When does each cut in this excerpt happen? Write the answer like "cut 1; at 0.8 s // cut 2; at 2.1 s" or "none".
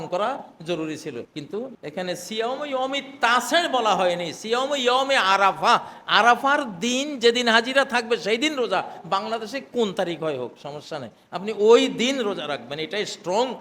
cut 1; at 1.4 s